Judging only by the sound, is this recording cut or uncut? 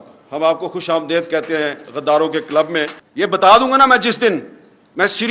cut